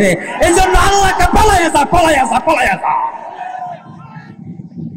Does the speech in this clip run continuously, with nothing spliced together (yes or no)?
no